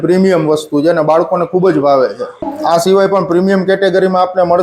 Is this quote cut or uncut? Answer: cut